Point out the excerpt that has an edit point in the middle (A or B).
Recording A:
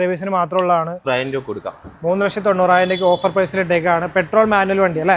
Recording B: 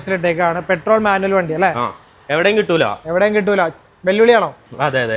A